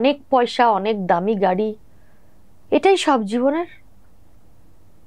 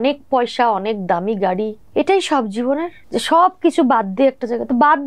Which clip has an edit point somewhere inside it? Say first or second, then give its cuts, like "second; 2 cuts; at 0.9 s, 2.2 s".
second; 2 cuts; at 1.8 s, 3.0 s